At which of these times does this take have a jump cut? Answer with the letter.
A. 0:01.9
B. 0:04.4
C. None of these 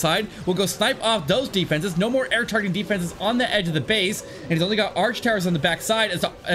C